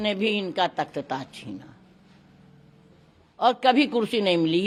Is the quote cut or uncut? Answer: uncut